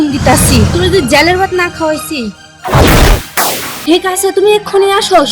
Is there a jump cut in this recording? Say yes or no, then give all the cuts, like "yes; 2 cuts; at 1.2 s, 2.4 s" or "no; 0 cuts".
yes; 1 cut; at 3.7 s